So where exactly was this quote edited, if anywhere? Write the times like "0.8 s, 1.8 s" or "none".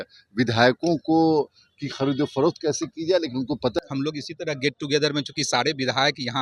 3.8 s